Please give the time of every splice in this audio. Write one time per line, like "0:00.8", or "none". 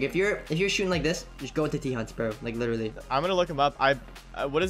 0:03.0